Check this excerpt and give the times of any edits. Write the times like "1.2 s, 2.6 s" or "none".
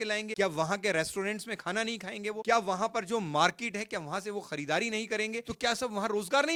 none